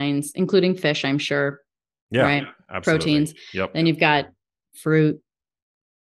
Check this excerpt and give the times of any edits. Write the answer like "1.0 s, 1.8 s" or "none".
none